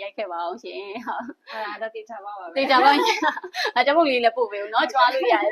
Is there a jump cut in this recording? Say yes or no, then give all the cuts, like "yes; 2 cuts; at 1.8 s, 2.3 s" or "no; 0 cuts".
no; 0 cuts